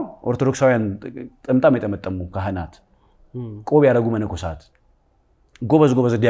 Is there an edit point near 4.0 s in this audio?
no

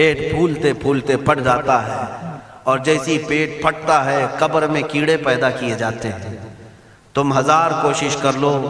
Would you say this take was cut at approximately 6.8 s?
no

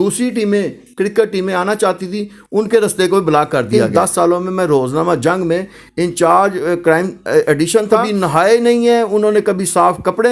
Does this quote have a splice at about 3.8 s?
yes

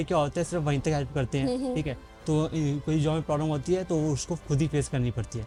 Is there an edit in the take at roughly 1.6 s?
no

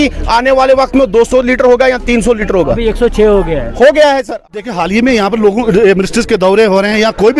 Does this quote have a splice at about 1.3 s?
no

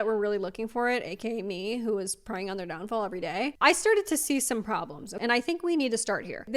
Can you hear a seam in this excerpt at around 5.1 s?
yes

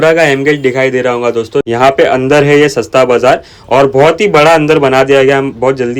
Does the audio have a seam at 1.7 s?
yes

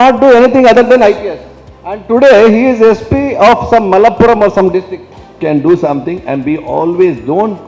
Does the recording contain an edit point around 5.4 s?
yes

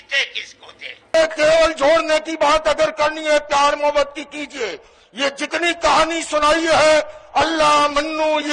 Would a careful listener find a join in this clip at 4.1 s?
no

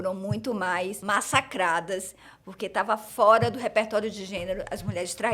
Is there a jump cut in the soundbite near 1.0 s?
yes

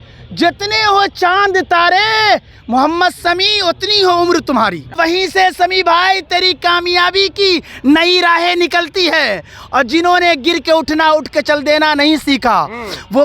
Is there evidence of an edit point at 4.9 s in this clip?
yes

